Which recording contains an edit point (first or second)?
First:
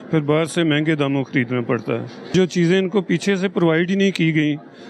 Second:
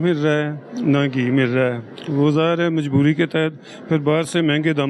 first